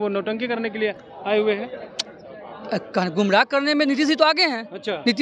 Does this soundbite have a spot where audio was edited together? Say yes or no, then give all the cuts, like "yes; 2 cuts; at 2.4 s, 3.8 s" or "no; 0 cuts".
no; 0 cuts